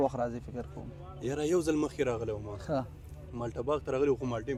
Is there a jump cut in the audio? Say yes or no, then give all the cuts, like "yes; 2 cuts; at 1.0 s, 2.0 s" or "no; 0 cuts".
no; 0 cuts